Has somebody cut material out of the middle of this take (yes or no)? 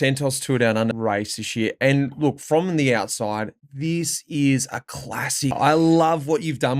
yes